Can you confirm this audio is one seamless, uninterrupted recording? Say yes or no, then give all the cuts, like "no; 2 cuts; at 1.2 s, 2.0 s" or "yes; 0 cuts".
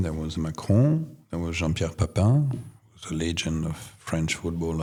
yes; 0 cuts